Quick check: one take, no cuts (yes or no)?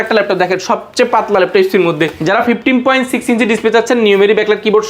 no